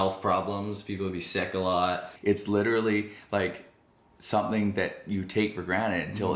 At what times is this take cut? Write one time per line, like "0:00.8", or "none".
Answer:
0:02.1